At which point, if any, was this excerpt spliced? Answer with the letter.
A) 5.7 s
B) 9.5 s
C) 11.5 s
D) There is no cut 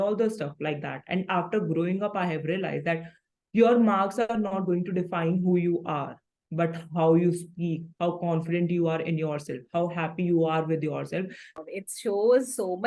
C